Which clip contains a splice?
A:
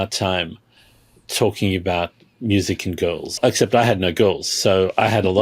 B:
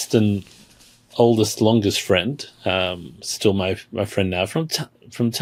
A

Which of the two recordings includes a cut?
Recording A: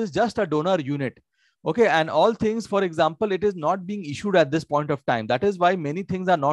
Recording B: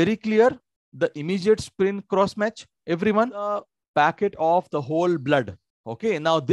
B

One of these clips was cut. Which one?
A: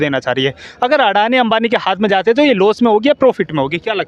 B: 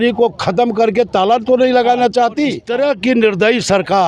B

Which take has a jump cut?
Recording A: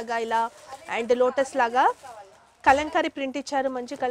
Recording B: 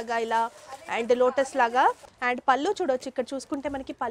B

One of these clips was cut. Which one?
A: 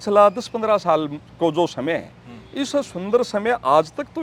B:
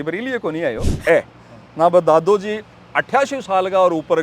B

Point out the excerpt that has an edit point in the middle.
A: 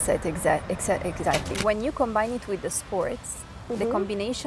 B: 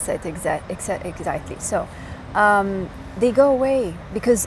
A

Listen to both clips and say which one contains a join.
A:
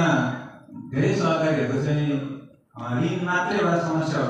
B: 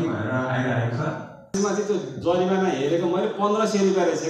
B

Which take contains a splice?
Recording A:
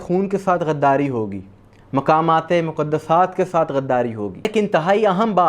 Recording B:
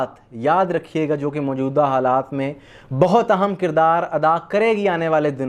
A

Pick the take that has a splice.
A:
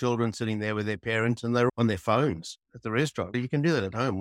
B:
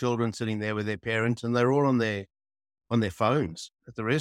A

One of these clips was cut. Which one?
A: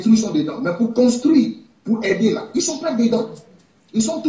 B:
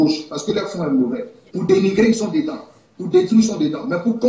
B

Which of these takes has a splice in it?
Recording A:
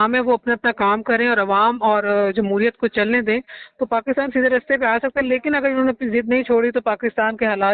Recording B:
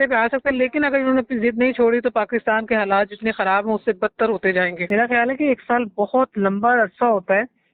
B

